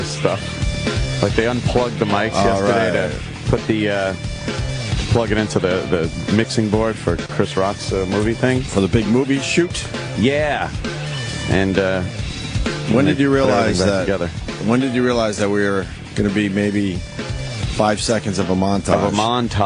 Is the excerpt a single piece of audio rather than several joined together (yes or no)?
yes